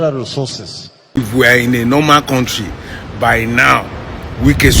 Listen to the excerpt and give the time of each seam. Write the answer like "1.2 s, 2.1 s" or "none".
1.2 s